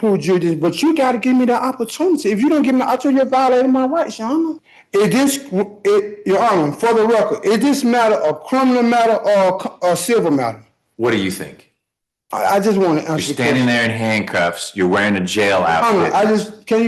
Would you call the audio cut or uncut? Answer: cut